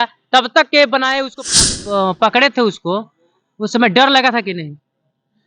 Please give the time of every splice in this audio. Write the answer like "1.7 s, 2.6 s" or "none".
1.6 s